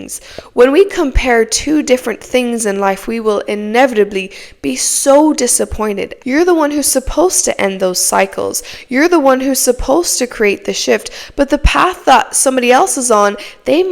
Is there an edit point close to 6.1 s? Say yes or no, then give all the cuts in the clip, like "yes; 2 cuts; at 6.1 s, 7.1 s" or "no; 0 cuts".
yes; 1 cut; at 6.1 s